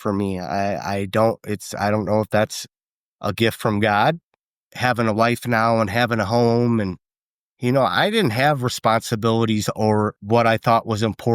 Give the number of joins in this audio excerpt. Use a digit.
2